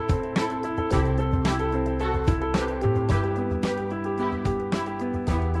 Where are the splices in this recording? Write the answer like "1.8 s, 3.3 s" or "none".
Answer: none